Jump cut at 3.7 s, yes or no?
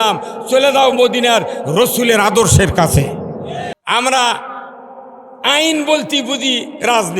yes